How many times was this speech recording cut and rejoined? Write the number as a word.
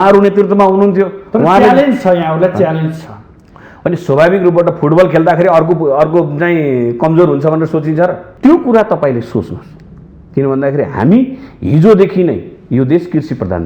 one